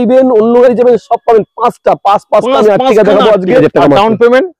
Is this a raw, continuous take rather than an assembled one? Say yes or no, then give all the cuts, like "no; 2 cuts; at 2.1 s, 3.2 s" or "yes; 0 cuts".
no; 1 cut; at 3.6 s